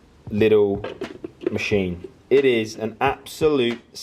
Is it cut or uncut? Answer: uncut